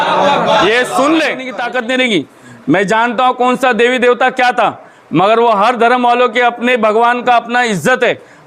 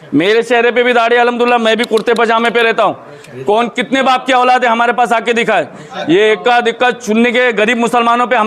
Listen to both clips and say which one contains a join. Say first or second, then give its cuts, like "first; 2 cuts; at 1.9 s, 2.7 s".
first; 1 cut; at 1.6 s